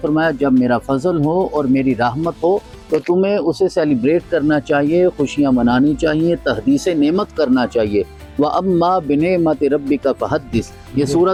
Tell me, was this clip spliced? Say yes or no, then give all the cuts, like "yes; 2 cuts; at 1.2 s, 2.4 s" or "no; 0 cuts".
no; 0 cuts